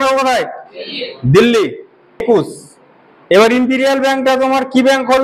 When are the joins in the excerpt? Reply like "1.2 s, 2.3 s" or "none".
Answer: 2.2 s

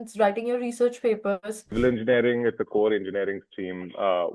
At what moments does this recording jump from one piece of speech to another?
1.6 s

